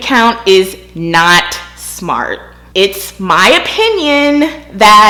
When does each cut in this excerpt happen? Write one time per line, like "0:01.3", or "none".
none